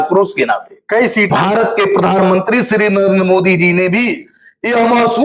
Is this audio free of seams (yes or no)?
no